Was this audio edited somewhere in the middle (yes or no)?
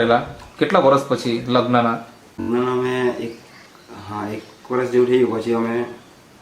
yes